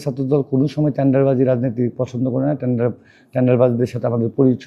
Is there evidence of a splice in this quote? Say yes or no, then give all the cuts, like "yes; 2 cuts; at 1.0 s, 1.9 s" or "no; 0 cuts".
no; 0 cuts